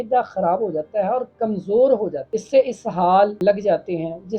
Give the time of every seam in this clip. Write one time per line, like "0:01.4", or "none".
0:02.2
0:03.4

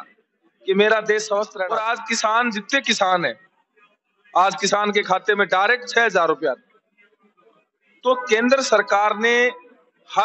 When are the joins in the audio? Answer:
0:01.7

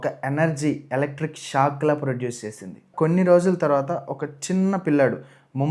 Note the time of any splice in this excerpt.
0:02.8

